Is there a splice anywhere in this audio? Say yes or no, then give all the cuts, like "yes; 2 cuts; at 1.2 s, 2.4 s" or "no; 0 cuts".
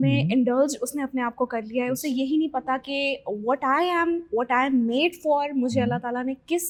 no; 0 cuts